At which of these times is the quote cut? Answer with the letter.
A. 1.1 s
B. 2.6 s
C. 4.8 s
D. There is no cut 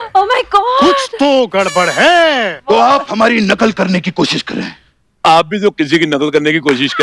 B